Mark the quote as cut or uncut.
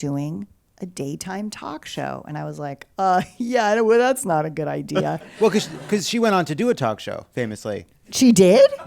cut